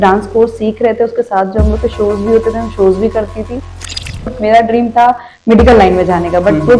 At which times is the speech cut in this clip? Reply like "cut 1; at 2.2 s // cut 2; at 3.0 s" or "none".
cut 1; at 4.1 s